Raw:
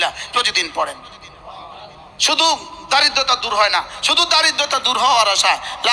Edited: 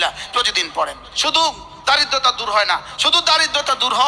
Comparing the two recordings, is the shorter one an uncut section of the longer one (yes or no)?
no